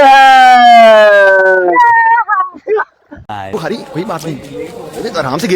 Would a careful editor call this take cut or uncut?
cut